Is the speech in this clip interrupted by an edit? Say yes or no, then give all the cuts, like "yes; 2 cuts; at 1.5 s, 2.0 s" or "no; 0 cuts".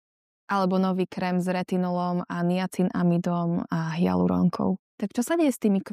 yes; 1 cut; at 4.9 s